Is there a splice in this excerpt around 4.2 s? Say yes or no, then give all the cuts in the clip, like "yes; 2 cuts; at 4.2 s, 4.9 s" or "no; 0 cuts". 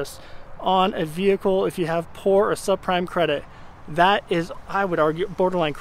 no; 0 cuts